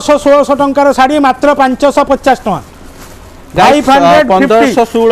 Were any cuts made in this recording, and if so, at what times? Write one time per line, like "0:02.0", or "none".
none